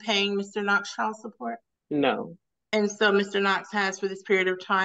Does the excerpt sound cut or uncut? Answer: cut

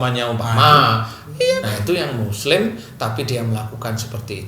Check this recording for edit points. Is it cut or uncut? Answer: cut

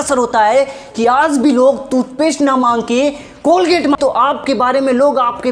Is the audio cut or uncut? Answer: cut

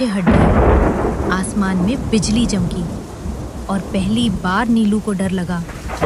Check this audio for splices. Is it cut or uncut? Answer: uncut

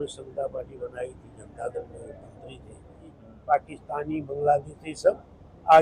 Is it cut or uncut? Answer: cut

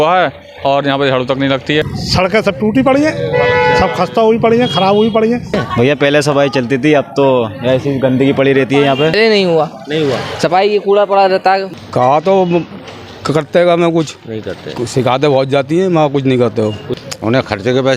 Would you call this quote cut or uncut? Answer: cut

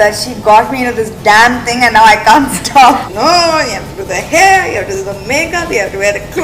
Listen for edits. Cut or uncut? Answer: cut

